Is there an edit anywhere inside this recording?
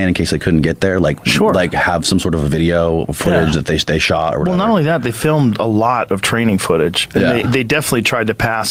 no; 0 cuts

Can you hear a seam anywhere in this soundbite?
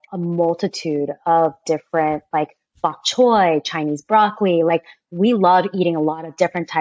no; 0 cuts

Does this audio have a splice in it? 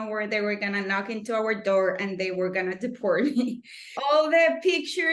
yes; 1 cut; at 3.9 s

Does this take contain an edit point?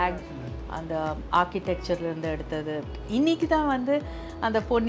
yes; 1 cut; at 2.9 s

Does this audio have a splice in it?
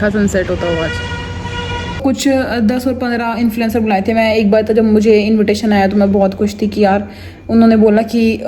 yes; 1 cut; at 1.9 s

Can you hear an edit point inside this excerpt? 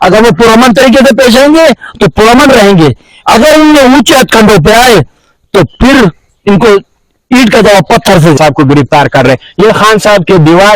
yes; 1 cut; at 8.4 s

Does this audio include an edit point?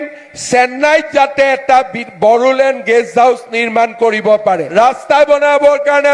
yes; 1 cut; at 4.7 s

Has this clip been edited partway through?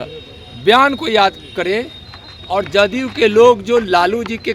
no; 0 cuts

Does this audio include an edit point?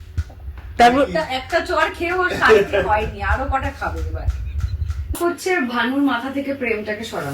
yes; 1 cut; at 5.1 s

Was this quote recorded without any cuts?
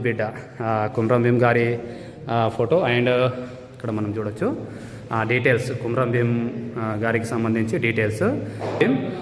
yes; 0 cuts

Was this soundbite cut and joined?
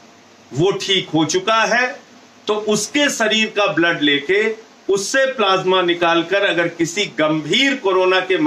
no; 0 cuts

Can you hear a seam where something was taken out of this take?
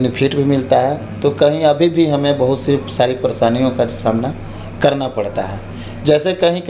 no; 0 cuts

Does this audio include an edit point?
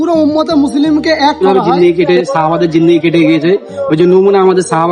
yes; 1 cut; at 1.4 s

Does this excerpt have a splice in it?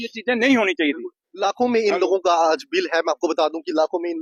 no; 0 cuts

